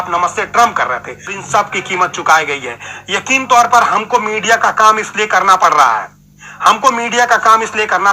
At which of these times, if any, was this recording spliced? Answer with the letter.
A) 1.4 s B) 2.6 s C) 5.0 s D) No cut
A